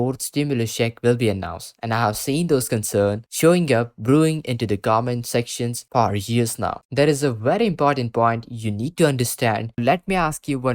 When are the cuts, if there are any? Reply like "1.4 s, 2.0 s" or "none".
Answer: 6.8 s, 9.8 s